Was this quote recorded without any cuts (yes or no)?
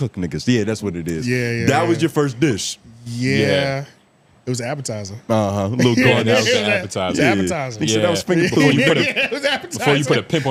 yes